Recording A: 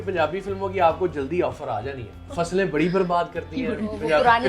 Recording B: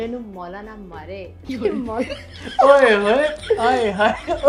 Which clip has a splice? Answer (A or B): A